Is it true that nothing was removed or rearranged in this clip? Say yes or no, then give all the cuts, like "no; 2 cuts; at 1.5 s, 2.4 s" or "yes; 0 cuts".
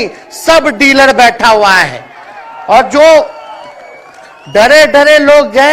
yes; 0 cuts